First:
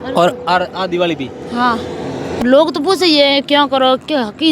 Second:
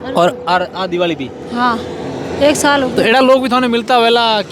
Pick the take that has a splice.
first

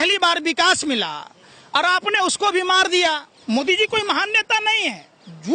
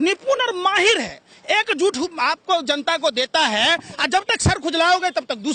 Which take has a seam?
first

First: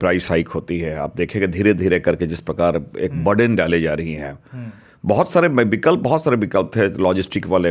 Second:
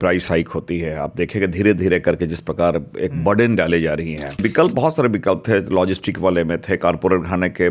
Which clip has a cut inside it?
second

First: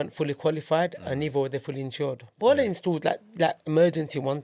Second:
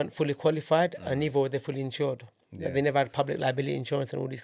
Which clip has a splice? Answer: first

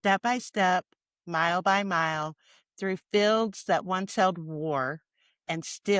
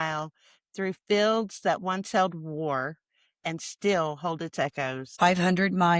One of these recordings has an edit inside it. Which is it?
second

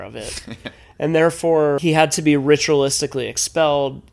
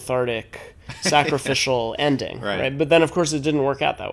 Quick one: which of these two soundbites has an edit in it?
first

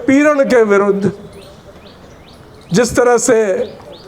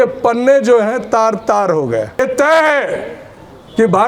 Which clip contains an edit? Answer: second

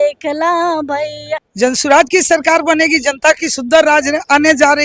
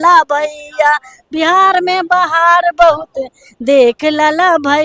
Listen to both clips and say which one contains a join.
first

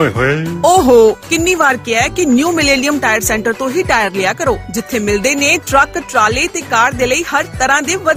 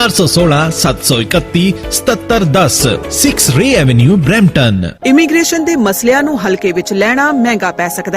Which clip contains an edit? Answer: second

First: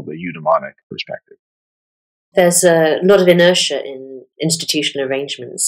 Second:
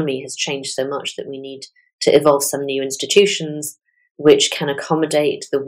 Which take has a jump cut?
first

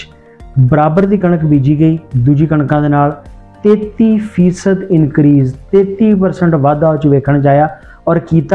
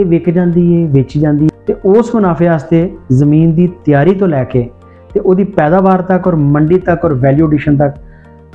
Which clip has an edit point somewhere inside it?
second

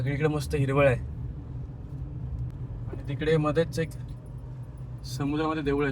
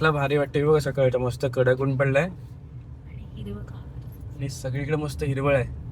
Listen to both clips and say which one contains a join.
first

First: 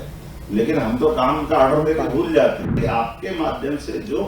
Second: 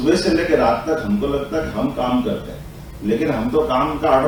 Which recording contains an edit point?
first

